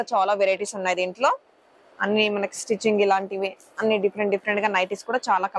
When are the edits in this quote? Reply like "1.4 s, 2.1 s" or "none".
none

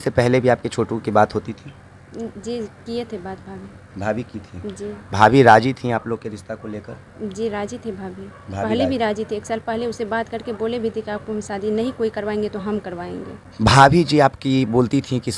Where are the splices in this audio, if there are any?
13.4 s

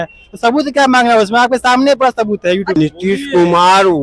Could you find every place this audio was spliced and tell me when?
2.8 s

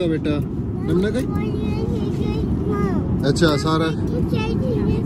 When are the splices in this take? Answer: none

